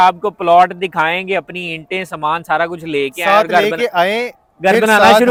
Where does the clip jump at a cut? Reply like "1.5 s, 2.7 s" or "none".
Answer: none